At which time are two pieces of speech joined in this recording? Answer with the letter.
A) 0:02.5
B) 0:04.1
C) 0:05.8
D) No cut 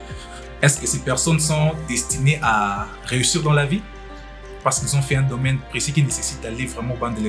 D